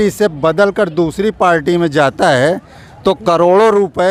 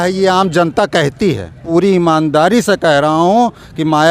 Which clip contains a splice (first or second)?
second